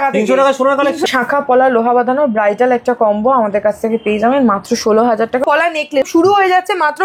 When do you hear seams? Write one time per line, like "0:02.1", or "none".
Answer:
0:01.1
0:05.5